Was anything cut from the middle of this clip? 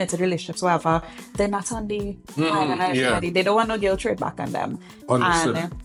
no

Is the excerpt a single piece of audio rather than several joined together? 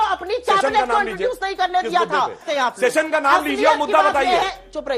no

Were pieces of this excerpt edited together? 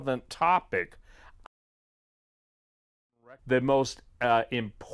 no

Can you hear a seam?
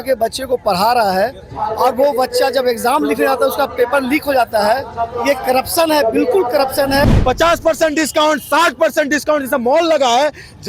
yes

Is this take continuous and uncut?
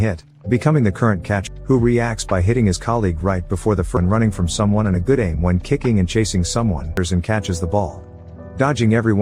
no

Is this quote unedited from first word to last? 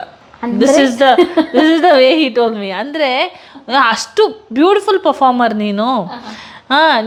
yes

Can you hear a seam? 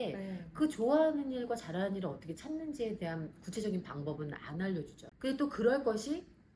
yes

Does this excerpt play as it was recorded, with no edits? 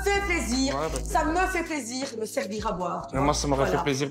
yes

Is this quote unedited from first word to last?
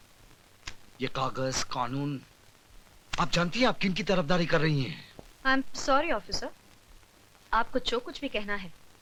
yes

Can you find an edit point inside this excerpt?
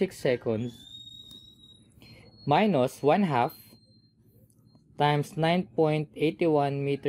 no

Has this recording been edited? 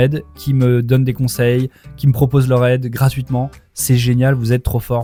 no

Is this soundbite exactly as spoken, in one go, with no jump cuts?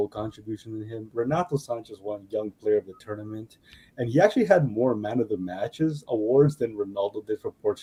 yes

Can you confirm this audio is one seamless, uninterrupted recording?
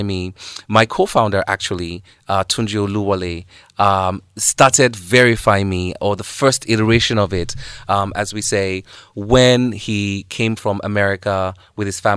yes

